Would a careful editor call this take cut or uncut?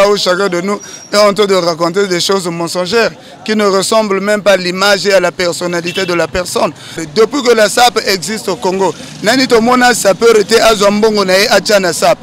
uncut